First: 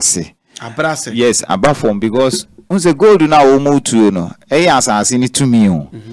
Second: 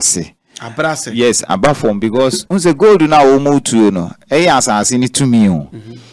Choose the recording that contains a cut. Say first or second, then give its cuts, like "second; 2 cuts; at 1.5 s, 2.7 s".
second; 1 cut; at 2.4 s